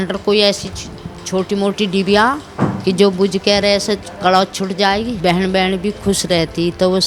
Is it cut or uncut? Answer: cut